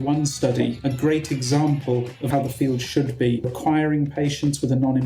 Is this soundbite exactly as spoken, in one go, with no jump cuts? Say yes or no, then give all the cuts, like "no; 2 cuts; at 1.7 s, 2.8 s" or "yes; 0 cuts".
no; 2 cuts; at 2.2 s, 3.5 s